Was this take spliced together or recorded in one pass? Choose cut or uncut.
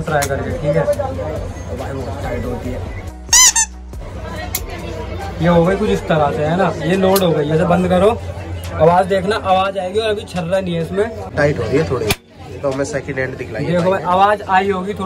uncut